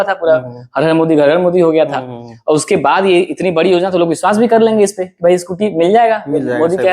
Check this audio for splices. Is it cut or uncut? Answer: uncut